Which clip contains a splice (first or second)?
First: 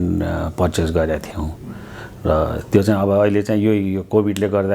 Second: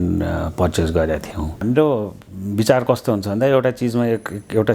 second